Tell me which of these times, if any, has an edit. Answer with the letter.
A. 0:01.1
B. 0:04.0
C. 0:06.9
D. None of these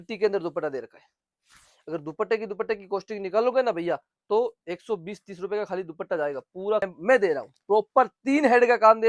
C